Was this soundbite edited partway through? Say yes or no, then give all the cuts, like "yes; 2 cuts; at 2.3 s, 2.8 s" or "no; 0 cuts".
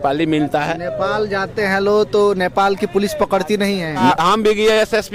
yes; 1 cut; at 4.2 s